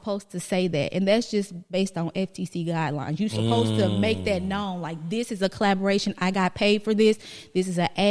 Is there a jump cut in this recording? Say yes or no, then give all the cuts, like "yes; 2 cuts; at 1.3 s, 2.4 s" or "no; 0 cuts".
no; 0 cuts